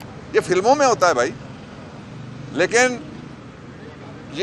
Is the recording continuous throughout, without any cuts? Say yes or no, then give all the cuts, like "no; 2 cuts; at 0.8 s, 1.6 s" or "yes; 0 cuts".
yes; 0 cuts